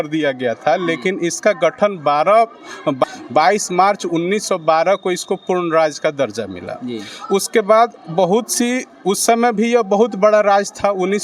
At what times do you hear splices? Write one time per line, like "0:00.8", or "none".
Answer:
none